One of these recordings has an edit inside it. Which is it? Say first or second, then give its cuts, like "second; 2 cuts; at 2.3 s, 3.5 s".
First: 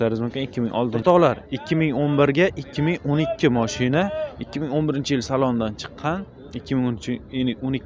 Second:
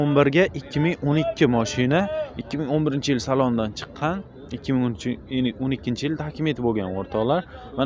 first; 1 cut; at 1.0 s